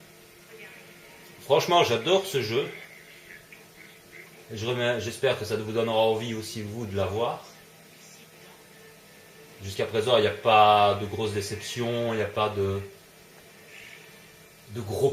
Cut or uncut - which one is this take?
cut